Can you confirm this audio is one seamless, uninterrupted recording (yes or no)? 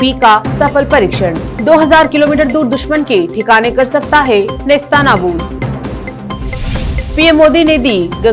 yes